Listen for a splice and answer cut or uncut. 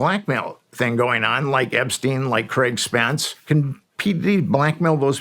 cut